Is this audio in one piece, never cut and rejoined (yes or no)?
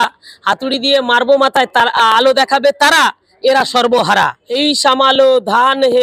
no